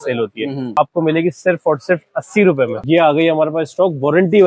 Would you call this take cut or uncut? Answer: cut